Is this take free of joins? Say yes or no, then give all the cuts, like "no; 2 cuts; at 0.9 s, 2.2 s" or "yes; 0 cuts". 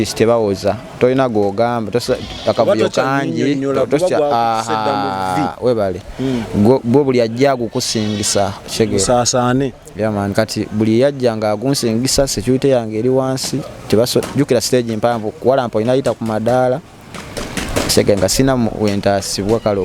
yes; 0 cuts